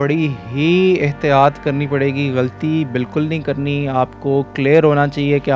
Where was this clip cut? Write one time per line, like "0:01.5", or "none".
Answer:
none